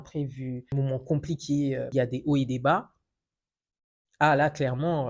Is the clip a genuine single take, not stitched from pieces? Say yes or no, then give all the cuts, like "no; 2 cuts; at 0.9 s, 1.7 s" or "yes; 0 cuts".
no; 2 cuts; at 0.7 s, 1.9 s